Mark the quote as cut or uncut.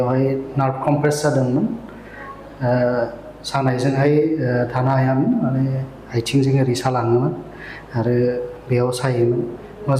uncut